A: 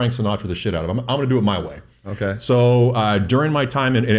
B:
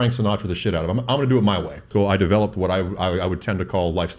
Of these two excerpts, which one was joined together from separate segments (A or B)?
B